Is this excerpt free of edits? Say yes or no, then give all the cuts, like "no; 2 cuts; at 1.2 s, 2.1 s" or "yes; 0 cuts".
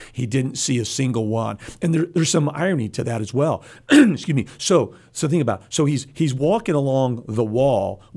yes; 0 cuts